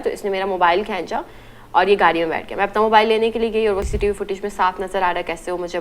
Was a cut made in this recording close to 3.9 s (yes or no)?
yes